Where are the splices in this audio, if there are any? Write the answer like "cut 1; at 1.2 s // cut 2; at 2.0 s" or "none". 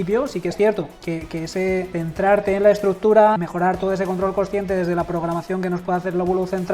cut 1; at 1.0 s // cut 2; at 1.9 s // cut 3; at 3.4 s